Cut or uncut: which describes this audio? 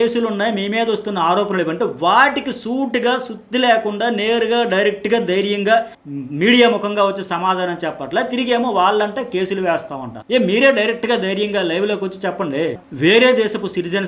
cut